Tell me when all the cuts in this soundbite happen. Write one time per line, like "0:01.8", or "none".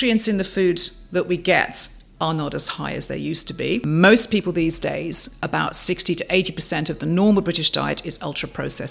0:03.8